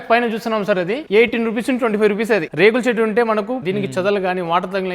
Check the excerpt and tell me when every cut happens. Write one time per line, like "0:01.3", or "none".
0:01.0
0:02.5
0:03.6